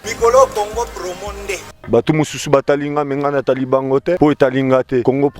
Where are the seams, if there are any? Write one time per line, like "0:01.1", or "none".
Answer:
0:01.7